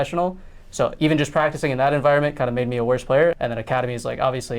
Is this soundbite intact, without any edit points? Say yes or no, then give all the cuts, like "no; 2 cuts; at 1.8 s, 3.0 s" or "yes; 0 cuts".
no; 1 cut; at 3.4 s